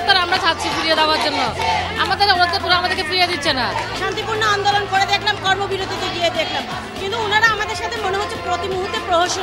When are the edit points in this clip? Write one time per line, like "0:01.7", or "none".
0:03.9